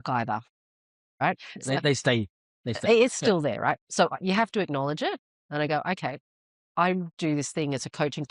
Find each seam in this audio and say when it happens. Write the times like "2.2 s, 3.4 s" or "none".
none